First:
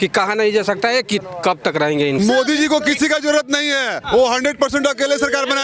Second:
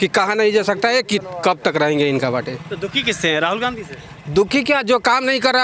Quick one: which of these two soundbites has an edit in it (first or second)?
first